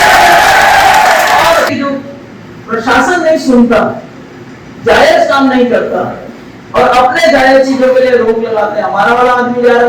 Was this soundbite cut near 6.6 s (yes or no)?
no